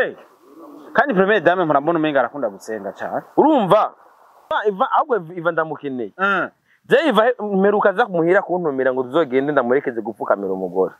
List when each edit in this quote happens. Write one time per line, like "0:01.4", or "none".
0:04.5